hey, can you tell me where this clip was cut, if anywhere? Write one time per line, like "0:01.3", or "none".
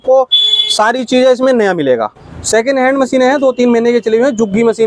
0:02.3